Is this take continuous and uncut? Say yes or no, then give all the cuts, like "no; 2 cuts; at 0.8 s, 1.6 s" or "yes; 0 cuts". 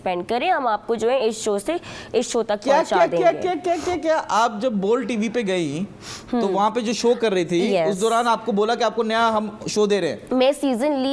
yes; 0 cuts